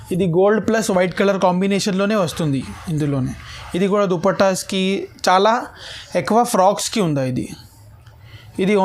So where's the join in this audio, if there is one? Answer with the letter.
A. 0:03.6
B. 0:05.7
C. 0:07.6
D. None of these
D